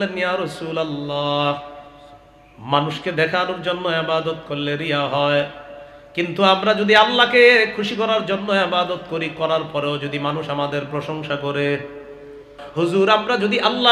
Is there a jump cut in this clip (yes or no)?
yes